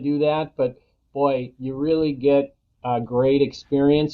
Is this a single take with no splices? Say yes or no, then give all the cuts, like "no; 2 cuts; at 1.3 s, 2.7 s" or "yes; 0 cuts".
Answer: yes; 0 cuts